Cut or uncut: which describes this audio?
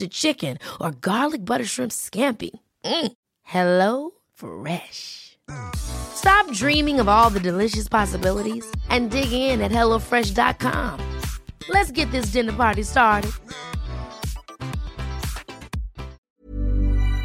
cut